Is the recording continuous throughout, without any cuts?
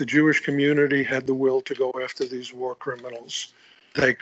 no; 1 cut; at 1.9 s

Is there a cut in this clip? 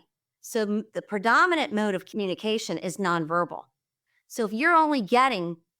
yes; 1 cut; at 2.1 s

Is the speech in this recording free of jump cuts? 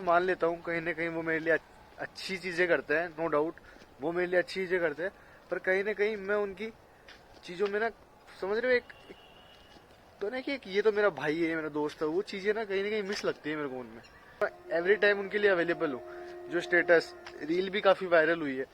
no; 1 cut; at 14.4 s

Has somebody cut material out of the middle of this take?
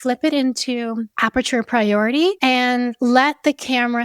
yes; 2 cuts; at 1.1 s, 2.4 s

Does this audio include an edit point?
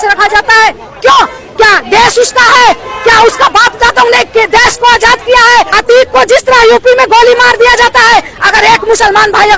yes; 1 cut; at 5.7 s

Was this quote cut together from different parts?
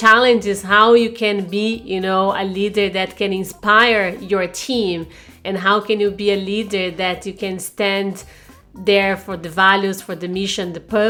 no; 0 cuts

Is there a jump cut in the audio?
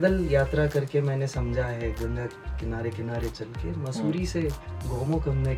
no; 0 cuts

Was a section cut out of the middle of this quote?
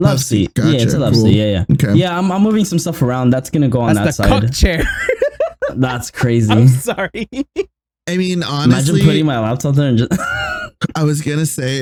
no; 0 cuts

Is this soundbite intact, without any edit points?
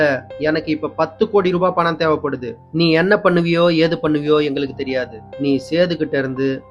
yes; 0 cuts

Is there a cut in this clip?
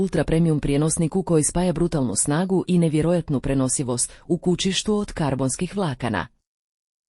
yes; 1 cut; at 5.1 s

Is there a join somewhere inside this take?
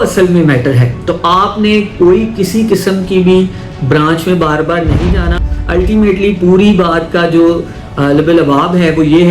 yes; 1 cut; at 5.4 s

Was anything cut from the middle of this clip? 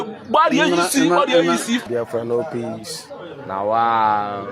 yes; 1 cut; at 1.8 s

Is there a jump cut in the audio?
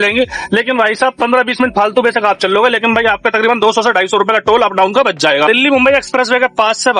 yes; 1 cut; at 5.5 s

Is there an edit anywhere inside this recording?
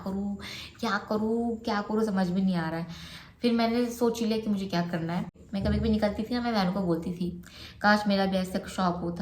yes; 1 cut; at 5.4 s

